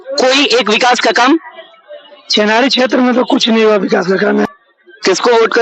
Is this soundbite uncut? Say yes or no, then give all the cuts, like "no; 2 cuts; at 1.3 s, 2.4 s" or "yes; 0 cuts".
no; 1 cut; at 4.5 s